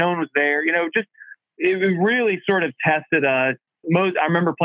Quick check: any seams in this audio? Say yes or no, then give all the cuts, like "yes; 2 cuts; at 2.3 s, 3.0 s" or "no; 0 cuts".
yes; 1 cut; at 3.7 s